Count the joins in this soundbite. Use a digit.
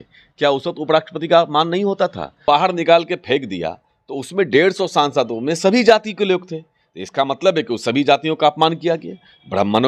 1